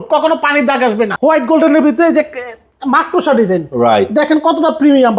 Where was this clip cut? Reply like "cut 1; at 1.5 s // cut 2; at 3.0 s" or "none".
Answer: cut 1; at 1.1 s